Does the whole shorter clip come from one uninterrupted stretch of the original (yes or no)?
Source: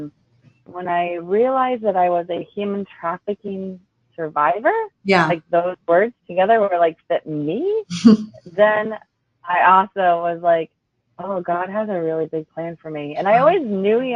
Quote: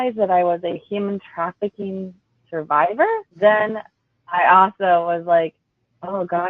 no